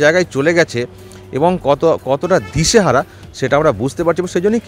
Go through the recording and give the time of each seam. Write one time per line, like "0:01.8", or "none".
none